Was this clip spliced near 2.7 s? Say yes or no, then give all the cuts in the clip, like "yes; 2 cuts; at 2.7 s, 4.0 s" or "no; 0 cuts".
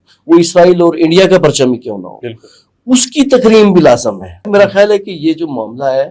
no; 1 cut; at 4.4 s